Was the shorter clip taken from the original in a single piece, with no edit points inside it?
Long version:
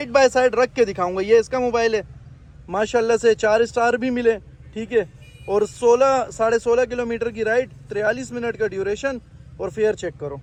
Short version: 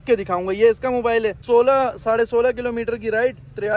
no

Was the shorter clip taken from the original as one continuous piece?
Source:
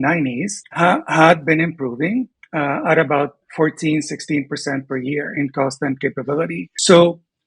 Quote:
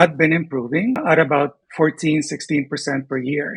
no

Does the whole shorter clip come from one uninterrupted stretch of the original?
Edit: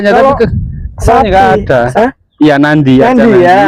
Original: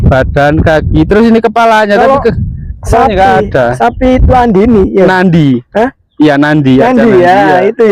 no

